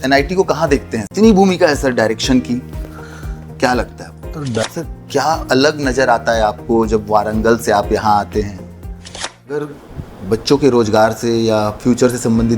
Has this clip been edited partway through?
yes; 3 cuts; at 1.0 s, 4.5 s, 9.3 s

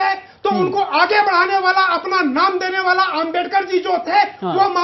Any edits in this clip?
no; 0 cuts

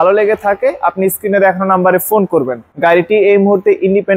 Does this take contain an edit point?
no; 0 cuts

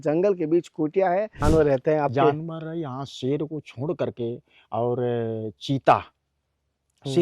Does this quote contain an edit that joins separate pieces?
yes; 1 cut; at 1.3 s

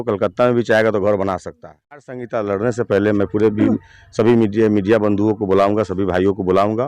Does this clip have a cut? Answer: yes; 1 cut; at 2.2 s

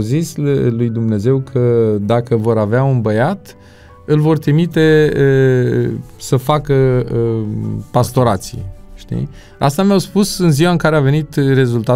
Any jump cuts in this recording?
no; 0 cuts

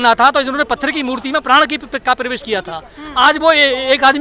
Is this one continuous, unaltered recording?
yes; 0 cuts

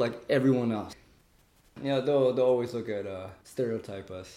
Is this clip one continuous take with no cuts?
no; 1 cut; at 1.6 s

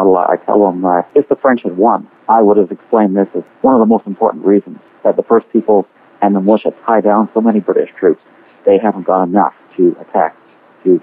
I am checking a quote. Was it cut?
yes; 2 cuts; at 1.1 s, 4.8 s

